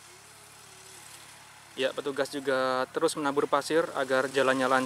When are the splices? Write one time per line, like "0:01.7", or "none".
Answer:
none